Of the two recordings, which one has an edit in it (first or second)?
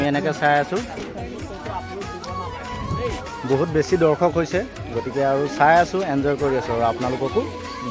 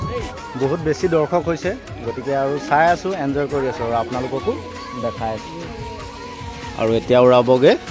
first